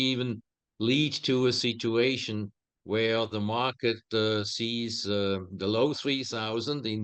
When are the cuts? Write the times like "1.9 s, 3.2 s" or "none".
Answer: none

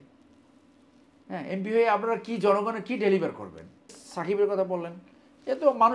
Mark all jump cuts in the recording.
4.0 s

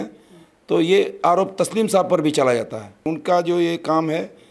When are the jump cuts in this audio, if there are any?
3.0 s

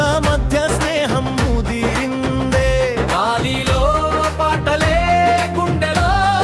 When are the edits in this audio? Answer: none

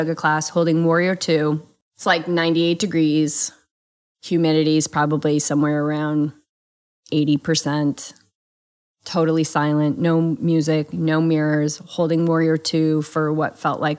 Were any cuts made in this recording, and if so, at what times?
1.7 s

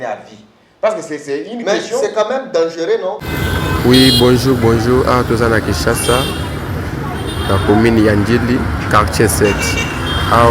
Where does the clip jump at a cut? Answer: 3.2 s

